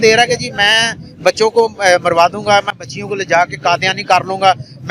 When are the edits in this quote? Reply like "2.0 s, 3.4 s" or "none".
none